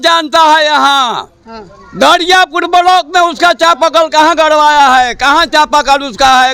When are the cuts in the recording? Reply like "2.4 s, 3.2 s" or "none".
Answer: none